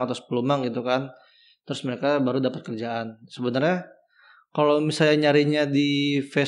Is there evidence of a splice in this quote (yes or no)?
no